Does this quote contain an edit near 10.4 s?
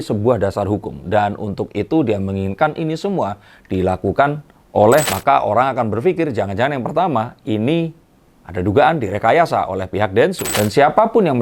yes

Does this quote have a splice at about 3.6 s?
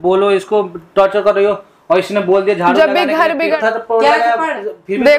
yes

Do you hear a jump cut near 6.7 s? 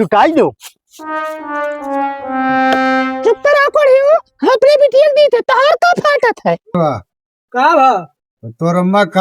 yes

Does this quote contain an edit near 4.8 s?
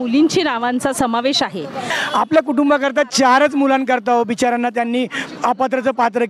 no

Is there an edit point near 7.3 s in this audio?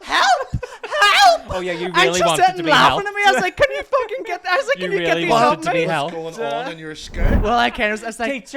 yes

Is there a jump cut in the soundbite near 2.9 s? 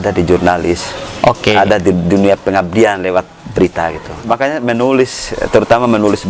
no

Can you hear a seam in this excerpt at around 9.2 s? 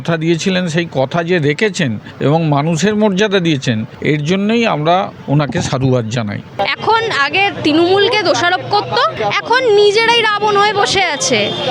yes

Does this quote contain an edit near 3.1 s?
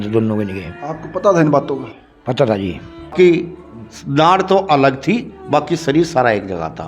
yes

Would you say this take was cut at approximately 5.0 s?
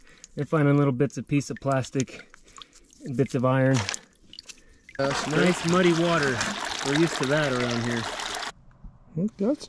yes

